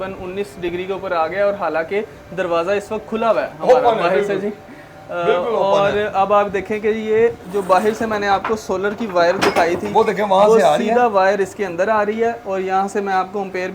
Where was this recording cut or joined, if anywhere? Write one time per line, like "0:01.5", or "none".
none